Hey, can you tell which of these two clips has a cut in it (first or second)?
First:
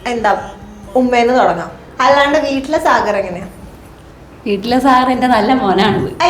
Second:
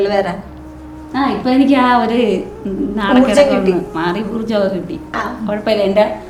first